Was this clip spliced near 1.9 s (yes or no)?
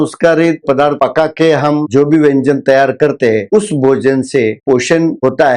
yes